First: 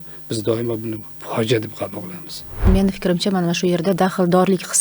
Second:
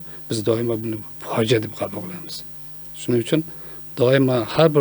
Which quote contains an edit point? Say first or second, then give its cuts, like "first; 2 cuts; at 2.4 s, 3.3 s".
first; 1 cut; at 2.7 s